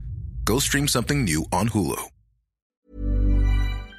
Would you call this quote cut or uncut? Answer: cut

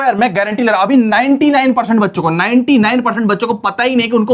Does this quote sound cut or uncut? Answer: uncut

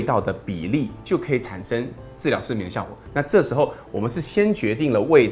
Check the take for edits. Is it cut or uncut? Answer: uncut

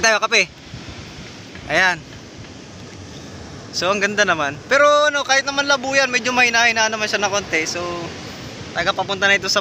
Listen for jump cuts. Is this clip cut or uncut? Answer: uncut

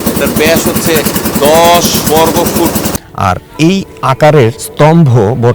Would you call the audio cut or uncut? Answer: cut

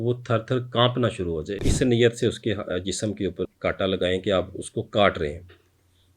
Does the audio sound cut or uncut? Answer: cut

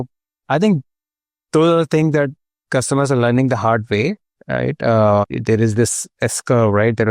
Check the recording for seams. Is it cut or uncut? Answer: cut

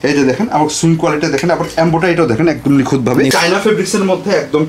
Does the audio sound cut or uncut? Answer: cut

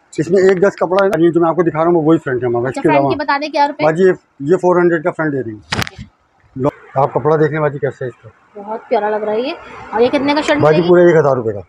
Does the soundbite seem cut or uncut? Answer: cut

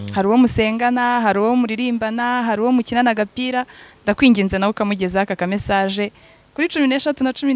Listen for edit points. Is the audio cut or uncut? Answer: uncut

